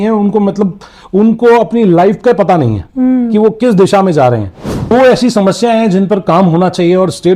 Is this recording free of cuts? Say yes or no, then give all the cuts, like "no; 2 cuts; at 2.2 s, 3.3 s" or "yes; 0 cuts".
no; 1 cut; at 4.9 s